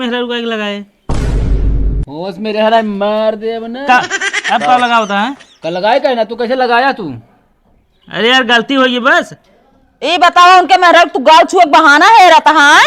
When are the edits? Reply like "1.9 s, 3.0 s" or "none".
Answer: 0.9 s, 2.1 s

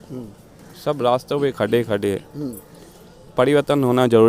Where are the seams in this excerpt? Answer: none

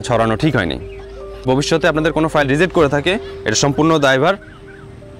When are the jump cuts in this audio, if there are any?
1.5 s

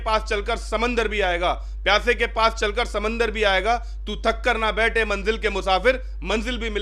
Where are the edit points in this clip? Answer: none

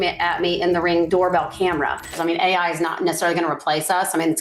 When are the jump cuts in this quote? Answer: 1.1 s, 2.1 s

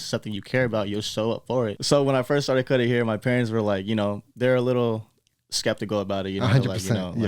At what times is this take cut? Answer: 1.8 s

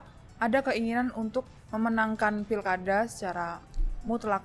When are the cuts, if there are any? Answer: none

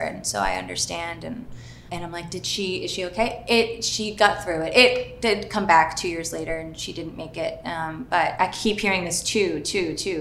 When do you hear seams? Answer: none

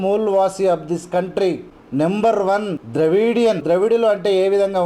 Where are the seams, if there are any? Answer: 1.7 s, 2.8 s, 3.6 s

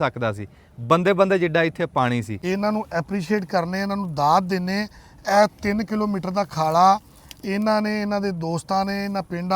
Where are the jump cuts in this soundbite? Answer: 2.4 s

